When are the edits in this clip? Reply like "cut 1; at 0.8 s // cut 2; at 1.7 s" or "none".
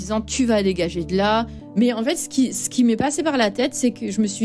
cut 1; at 1.7 s